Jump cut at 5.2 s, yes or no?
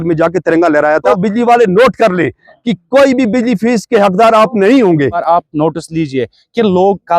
yes